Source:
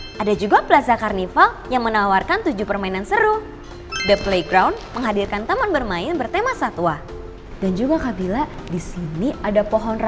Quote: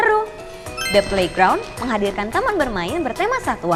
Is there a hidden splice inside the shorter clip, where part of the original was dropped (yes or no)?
no